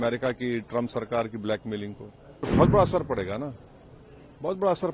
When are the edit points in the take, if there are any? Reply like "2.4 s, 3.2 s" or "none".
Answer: 2.5 s